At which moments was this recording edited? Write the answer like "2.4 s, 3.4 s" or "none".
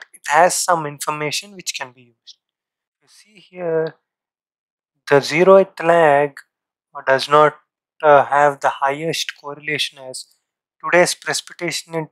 2.9 s